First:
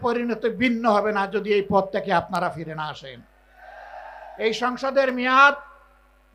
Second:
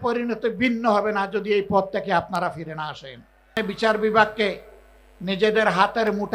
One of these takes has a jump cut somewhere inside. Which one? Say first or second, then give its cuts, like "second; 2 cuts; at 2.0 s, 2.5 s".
second; 1 cut; at 3.5 s